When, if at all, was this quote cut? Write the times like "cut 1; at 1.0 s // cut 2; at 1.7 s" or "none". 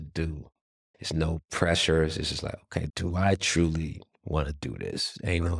cut 1; at 4.1 s